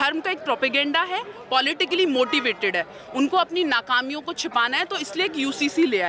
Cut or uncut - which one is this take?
uncut